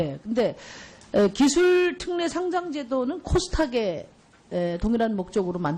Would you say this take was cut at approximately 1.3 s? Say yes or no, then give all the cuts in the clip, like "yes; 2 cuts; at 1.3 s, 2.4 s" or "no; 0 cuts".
no; 1 cut; at 3.7 s